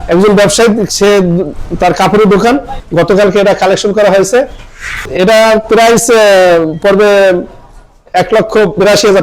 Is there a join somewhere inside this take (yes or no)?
yes